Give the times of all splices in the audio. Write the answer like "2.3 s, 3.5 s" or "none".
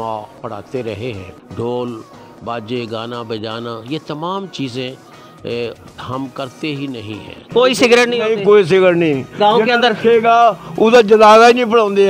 1.4 s, 7.3 s